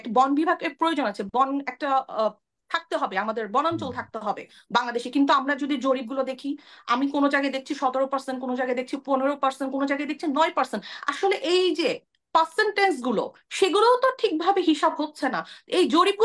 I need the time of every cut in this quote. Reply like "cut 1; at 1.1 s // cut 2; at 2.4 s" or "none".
none